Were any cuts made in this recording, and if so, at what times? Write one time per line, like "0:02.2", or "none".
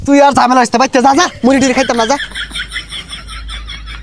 0:02.2